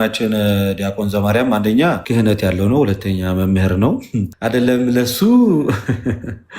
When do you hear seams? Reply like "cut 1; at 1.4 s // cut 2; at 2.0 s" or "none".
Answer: cut 1; at 2.0 s // cut 2; at 4.3 s